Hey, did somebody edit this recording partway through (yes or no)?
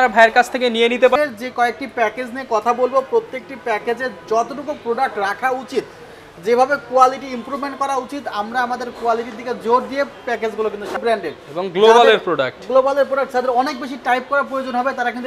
yes